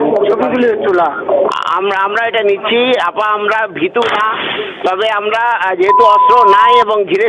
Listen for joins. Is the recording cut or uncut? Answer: uncut